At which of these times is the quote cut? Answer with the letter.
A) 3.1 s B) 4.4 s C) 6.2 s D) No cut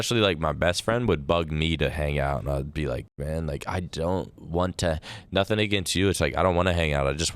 A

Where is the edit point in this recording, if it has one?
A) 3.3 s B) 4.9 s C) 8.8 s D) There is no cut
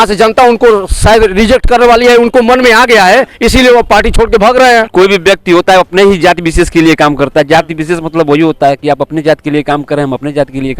B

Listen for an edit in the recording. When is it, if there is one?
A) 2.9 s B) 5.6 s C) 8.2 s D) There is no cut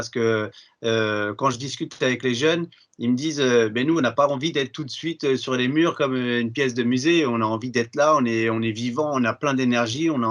D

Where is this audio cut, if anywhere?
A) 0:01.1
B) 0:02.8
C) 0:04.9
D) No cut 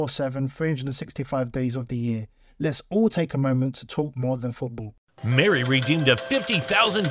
C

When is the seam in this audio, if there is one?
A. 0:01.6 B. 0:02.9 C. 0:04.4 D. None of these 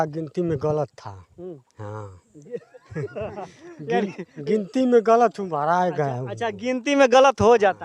D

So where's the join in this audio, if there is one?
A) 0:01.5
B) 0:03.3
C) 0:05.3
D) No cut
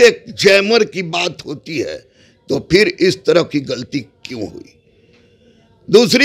D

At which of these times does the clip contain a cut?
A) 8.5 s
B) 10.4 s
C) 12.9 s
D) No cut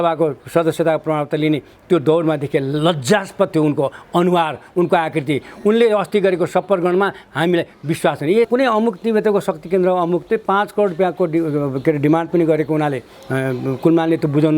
A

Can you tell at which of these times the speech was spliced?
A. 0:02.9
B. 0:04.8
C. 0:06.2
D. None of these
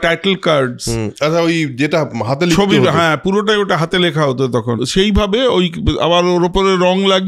B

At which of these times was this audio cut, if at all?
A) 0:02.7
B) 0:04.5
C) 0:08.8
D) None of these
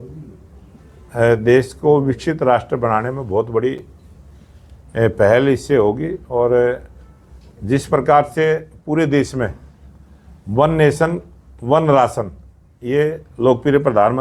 D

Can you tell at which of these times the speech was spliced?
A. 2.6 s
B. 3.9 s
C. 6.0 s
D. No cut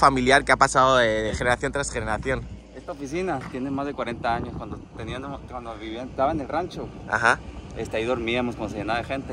D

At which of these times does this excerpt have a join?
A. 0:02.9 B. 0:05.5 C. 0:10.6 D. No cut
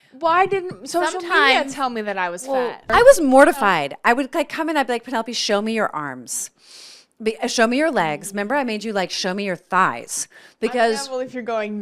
A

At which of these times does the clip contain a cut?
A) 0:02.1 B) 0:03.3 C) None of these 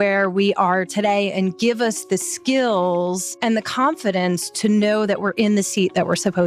B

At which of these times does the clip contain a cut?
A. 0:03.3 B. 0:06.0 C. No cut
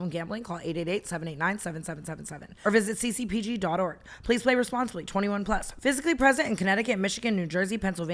C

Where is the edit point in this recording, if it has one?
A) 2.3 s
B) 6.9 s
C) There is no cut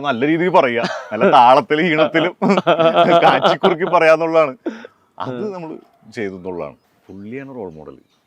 B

